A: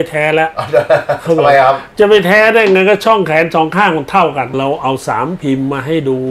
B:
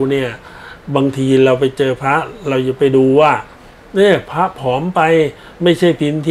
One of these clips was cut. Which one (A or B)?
A